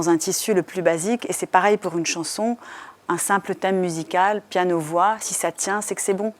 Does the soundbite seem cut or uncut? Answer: uncut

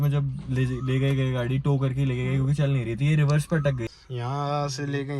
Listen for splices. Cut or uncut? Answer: cut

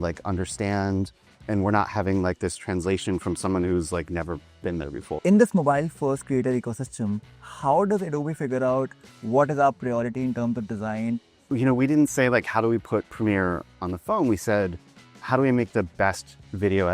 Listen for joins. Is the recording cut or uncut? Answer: cut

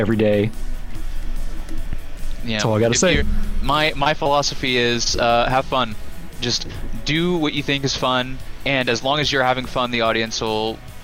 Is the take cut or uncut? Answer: uncut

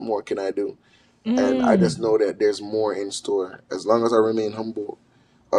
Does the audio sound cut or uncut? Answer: uncut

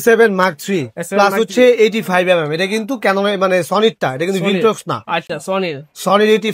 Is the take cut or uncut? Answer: uncut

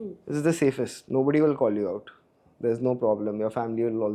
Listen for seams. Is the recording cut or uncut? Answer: uncut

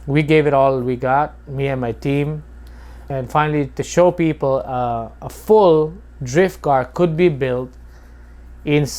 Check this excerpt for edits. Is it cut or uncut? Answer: cut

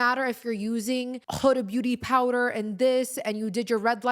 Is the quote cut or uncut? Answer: cut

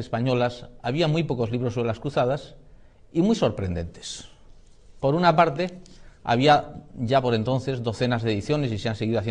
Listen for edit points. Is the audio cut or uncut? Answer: uncut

